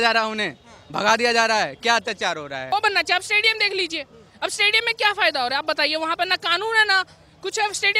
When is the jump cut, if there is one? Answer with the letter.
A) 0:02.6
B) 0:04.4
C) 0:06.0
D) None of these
A